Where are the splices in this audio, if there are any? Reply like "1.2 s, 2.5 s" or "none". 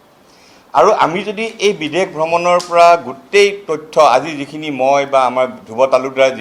none